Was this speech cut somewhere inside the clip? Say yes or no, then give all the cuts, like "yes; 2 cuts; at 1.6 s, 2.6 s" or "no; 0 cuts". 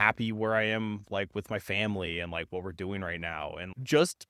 no; 0 cuts